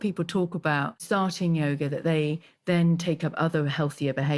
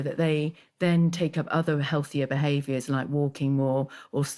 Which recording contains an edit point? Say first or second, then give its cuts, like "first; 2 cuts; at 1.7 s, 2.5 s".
first; 1 cut; at 0.9 s